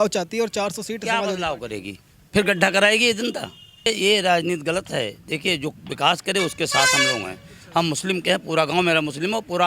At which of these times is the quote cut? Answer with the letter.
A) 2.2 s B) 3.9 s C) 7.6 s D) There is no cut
B